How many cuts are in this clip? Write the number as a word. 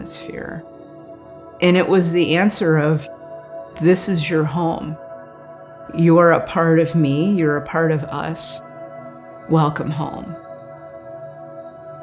zero